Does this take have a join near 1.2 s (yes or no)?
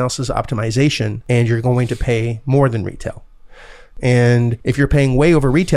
yes